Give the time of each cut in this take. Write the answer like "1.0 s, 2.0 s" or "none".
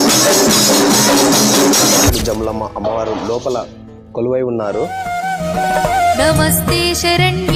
2.1 s, 4.9 s